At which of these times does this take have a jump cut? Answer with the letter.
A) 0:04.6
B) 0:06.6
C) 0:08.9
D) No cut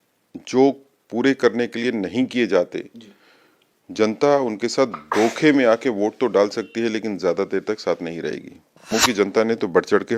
C